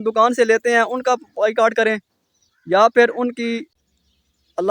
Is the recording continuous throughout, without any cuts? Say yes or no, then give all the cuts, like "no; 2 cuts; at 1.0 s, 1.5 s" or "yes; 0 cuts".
no; 1 cut; at 3.7 s